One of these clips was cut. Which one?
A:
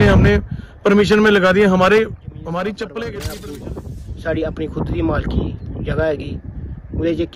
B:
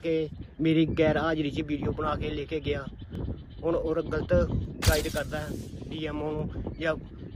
A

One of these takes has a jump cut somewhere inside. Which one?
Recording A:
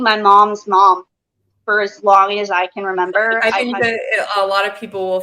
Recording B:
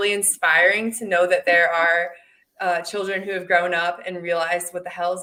A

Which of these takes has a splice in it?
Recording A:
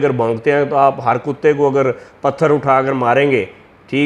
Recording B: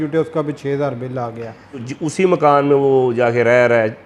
B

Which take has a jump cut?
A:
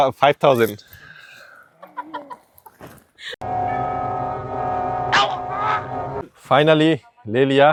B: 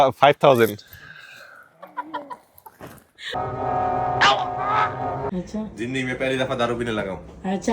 B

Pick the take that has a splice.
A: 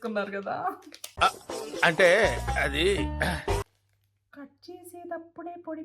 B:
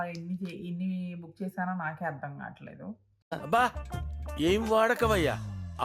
A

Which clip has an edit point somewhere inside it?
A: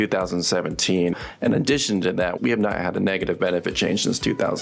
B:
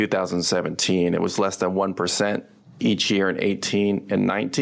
A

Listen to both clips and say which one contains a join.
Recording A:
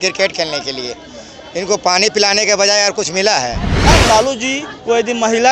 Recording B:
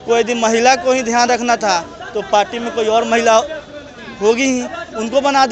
A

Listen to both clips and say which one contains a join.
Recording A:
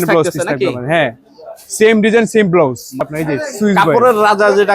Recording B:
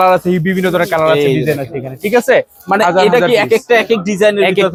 A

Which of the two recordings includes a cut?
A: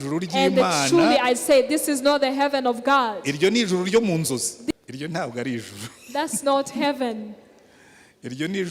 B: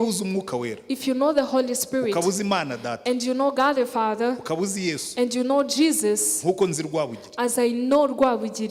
A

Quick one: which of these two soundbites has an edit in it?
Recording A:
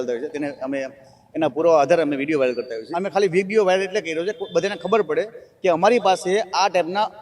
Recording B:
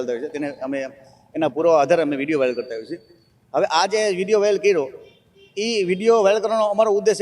A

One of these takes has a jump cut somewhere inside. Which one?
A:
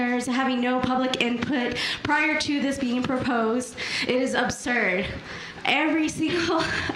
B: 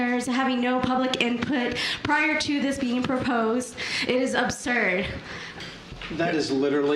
B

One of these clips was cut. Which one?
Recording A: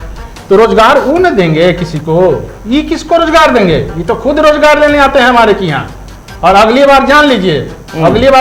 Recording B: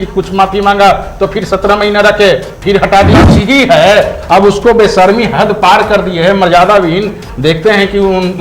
B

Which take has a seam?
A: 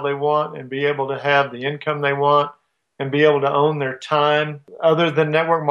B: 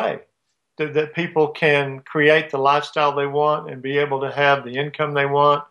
A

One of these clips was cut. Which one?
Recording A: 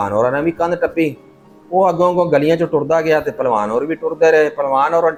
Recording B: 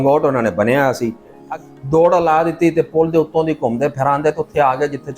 B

